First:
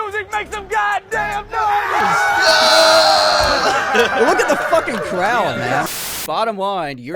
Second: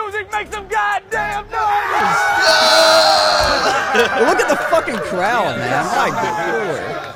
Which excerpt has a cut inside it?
first; 1 cut; at 5.9 s

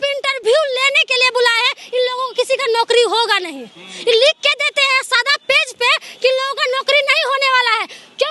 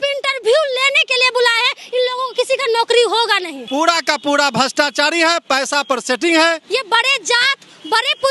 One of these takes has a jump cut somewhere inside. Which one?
second; 2 cuts; at 3.5 s, 6.6 s

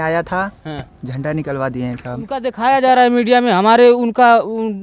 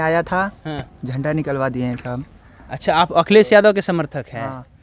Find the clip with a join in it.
first; 1 cut; at 2.5 s

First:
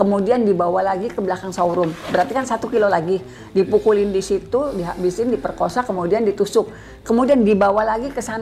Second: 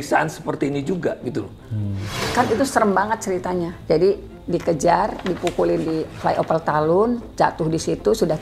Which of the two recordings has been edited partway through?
second; 3 cuts; at 2.2 s, 3.8 s, 7.3 s

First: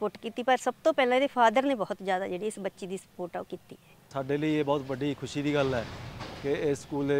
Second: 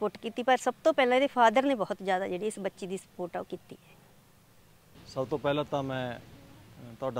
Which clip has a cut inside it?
first; 1 cut; at 4.0 s

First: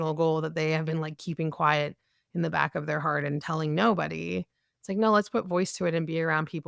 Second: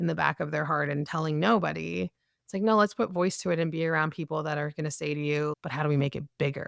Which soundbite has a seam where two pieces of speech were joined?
second; 1 cut; at 5.5 s

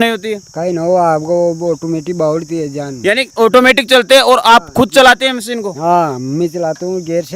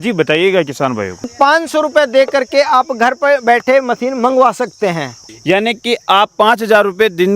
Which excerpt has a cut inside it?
second; 2 cuts; at 1.3 s, 5.2 s

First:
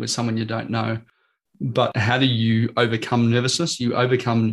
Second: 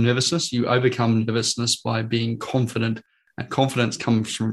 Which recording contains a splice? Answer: first; 1 cut; at 1.9 s

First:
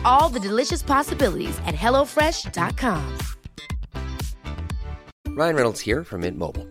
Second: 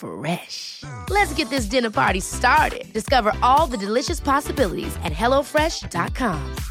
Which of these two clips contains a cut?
first; 1 cut; at 5.1 s

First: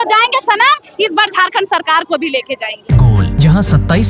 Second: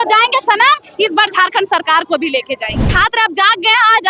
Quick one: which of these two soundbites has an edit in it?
second; 1 cut; at 2.8 s

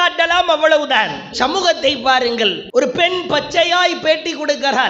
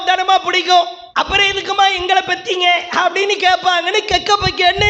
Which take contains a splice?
first; 1 cut; at 2.6 s

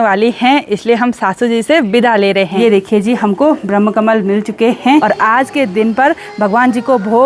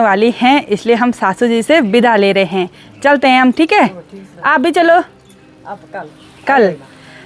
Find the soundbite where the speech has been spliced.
first; 2 cuts; at 2.6 s, 5.0 s

